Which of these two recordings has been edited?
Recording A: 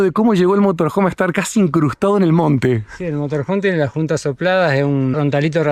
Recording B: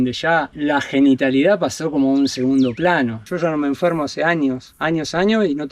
B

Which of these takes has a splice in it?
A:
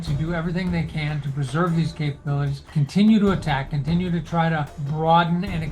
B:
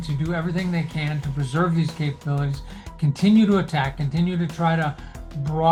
A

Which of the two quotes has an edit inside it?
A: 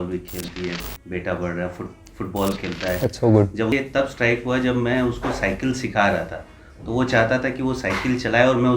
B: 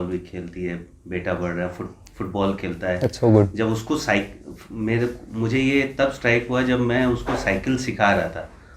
A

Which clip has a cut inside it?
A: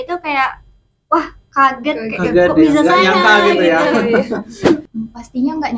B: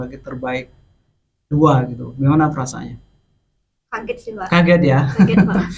A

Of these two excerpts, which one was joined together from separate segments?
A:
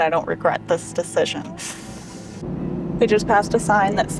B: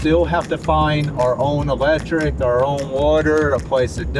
A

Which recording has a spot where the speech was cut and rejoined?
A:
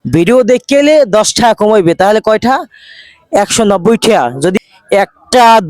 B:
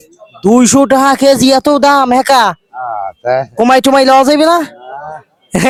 A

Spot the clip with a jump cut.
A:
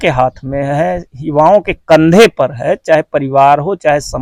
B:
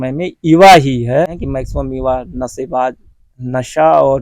B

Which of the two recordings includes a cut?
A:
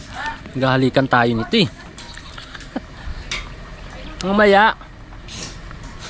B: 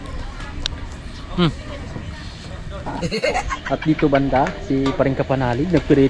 B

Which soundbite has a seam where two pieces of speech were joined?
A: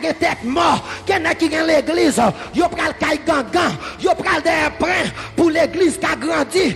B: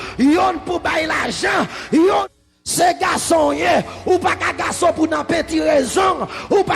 B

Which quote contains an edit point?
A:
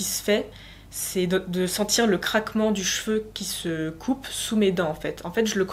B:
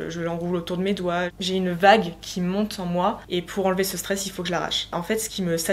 B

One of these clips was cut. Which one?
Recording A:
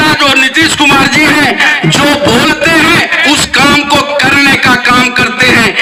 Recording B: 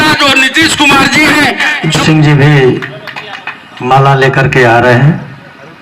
B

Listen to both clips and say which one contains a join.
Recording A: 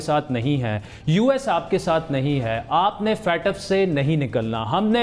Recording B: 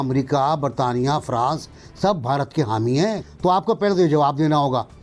B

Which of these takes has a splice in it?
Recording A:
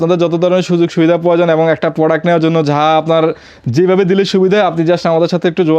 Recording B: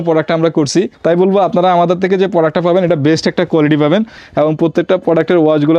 B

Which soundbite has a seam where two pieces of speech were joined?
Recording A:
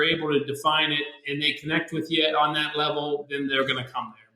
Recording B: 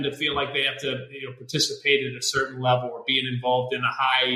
A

